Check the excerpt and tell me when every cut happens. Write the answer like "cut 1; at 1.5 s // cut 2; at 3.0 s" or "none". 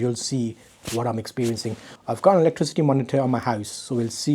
cut 1; at 1.9 s